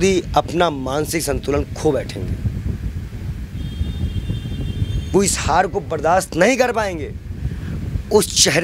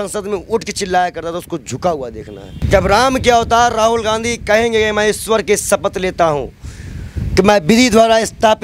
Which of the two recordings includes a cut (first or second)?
second